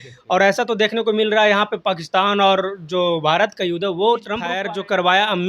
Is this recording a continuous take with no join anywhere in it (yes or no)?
no